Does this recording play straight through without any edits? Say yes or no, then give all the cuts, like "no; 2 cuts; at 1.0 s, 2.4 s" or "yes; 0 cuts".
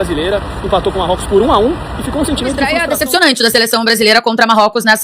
no; 1 cut; at 2.8 s